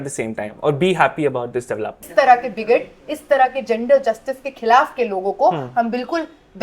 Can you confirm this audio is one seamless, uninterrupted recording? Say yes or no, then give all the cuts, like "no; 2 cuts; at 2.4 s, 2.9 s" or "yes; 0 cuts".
no; 1 cut; at 2.1 s